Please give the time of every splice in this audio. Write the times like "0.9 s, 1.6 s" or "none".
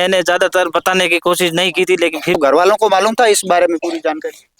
2.4 s